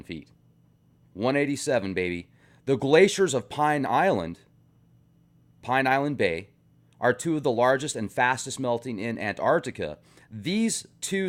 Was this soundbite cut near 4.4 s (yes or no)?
no